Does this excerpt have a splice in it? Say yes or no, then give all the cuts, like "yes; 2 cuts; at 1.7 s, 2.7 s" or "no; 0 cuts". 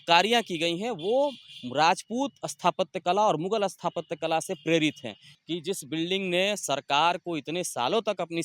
yes; 1 cut; at 5.2 s